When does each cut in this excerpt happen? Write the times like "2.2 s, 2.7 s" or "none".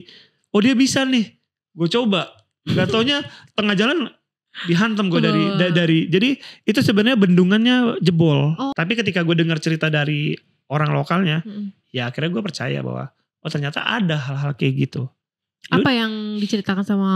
8.7 s